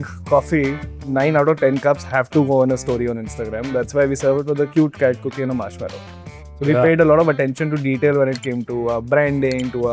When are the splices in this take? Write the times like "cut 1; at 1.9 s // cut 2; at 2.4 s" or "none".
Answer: none